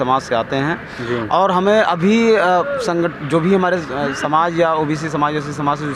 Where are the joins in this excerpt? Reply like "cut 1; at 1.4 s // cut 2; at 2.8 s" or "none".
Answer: none